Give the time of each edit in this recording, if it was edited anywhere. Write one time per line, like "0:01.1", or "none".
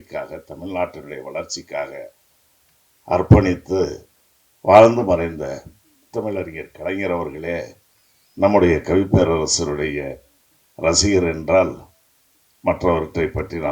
0:05.9